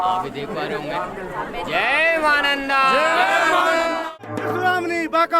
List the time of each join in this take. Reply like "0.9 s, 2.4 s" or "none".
4.1 s